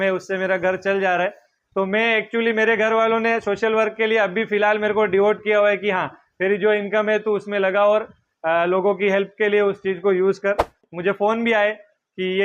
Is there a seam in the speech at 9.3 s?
no; 1 cut; at 10.8 s

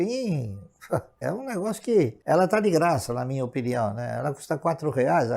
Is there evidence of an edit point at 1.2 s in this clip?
yes; 2 cuts; at 1.2 s, 2.2 s

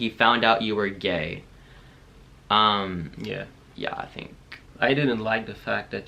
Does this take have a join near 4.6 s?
yes; 1 cut; at 4.6 s

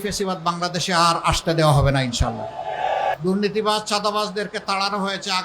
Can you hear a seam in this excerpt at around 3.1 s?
yes; 1 cut; at 3.1 s

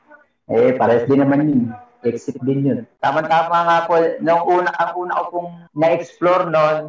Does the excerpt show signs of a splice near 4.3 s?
no; 2 cuts; at 2.9 s, 5.6 s

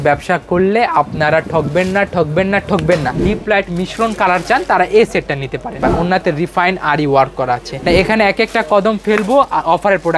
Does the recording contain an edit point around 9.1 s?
no; 3 cuts; at 3.2 s, 5.7 s, 7.7 s

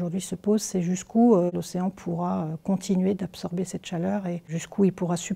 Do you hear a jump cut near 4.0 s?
no; 1 cut; at 1.5 s

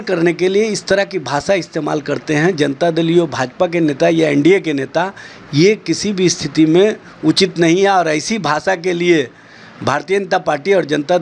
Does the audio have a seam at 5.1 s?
no; 0 cuts

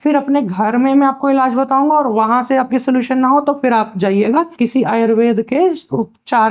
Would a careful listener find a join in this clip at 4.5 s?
yes; 1 cut; at 4.5 s

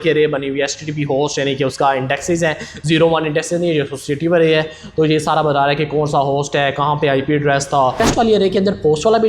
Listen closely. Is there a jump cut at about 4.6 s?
no; 1 cut; at 8.0 s

